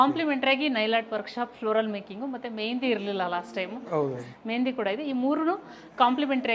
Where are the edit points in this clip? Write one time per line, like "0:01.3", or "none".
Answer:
0:04.2